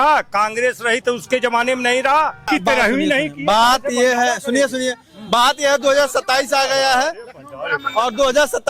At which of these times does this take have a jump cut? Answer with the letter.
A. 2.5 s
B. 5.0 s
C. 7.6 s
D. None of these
A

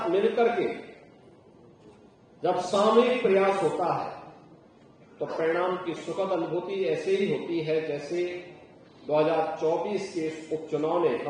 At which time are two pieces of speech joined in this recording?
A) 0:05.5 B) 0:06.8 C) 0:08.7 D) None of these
D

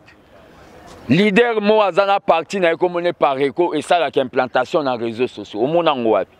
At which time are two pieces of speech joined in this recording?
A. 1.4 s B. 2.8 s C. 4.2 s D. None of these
D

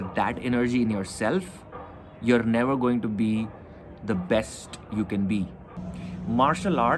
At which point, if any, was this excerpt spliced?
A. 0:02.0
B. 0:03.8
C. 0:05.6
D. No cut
C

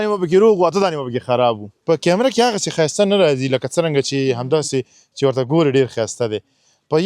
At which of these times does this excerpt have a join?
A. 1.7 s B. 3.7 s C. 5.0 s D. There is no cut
A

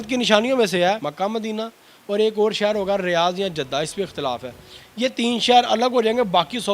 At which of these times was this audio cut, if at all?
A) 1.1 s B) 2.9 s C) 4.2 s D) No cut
A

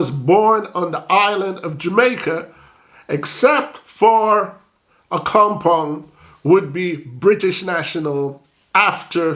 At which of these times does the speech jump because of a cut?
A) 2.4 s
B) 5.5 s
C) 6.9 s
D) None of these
D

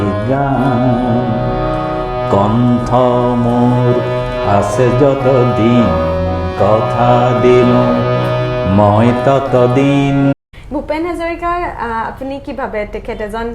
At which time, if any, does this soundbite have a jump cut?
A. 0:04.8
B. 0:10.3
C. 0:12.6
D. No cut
B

